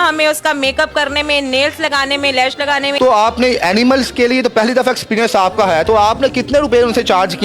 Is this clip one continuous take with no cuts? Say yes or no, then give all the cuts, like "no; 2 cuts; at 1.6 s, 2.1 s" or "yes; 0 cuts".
no; 1 cut; at 3.1 s